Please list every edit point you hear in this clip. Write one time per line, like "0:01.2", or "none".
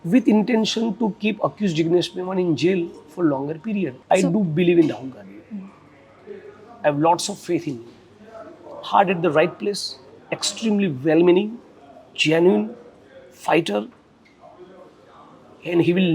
0:04.0